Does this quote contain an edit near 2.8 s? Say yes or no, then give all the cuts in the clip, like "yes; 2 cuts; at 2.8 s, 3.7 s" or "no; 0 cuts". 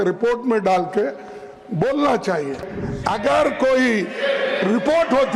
yes; 1 cut; at 2.8 s